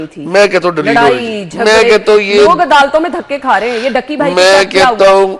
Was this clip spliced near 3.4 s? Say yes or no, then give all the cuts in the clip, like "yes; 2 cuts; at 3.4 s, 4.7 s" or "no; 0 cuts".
no; 0 cuts